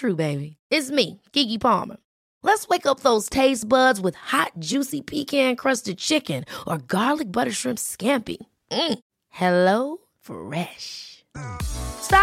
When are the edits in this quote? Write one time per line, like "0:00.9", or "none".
none